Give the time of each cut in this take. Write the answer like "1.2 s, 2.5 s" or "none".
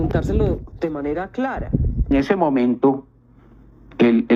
1.9 s